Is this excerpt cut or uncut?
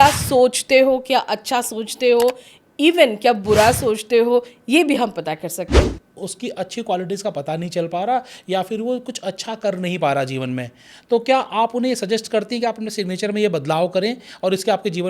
cut